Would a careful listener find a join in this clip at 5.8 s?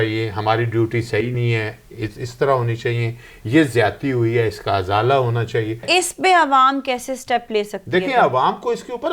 yes; 1 cut; at 5.8 s

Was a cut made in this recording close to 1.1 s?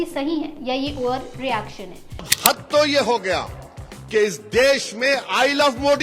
no; 1 cut; at 2.3 s

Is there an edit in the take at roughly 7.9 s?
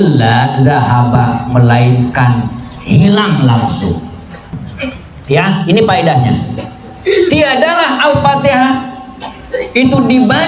no; 1 cut; at 4.6 s

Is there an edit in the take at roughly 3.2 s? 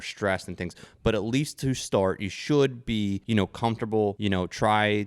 yes; 2 cuts; at 3.2 s, 4.2 s

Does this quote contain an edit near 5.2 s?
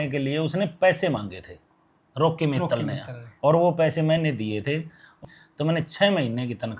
yes; 1 cut; at 5.2 s

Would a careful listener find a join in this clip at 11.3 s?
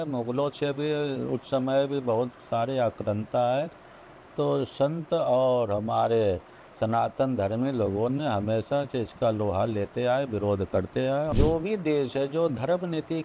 yes; 1 cut; at 11.3 s

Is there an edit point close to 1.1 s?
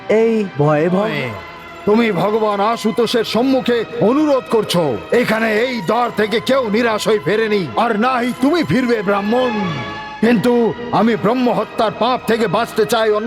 yes; 1 cut; at 1.1 s

